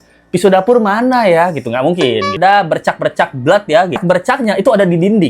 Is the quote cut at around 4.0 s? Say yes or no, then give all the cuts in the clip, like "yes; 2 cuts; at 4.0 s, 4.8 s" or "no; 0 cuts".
yes; 2 cuts; at 2.4 s, 4.0 s